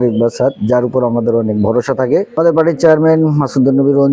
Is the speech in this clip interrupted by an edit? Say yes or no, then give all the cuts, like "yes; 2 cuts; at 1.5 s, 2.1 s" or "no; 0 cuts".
yes; 1 cut; at 2.4 s